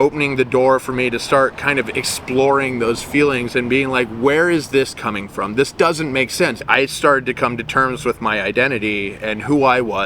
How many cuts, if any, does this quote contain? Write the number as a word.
one